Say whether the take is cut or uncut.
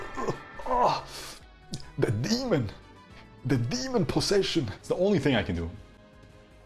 cut